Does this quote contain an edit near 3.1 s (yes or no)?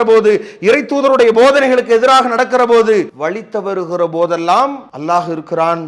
yes